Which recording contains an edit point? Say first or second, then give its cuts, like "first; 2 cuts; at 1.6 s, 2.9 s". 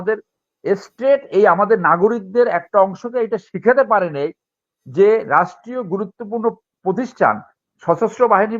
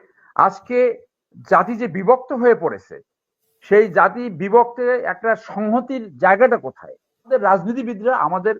second; 1 cut; at 7.3 s